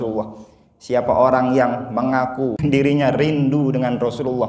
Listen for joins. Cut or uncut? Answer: cut